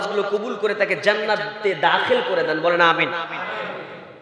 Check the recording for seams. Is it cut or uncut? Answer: uncut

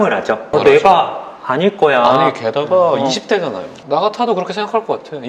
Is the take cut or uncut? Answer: cut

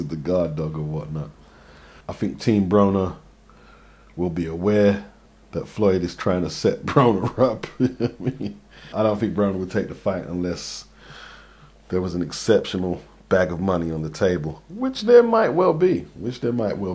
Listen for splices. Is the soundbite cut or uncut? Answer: cut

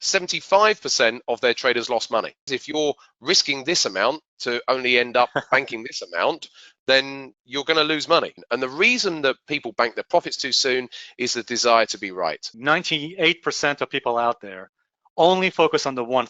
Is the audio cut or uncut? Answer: cut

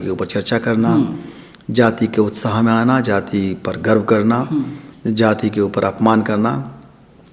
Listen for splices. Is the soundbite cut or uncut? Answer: uncut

